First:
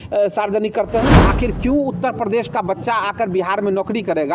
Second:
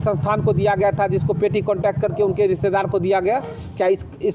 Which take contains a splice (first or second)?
first